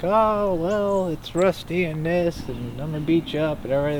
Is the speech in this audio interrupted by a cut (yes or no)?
no